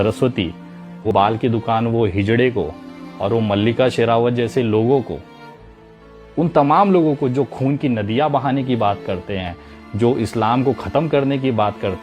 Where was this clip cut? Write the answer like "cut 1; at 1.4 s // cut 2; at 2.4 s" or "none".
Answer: cut 1; at 1.1 s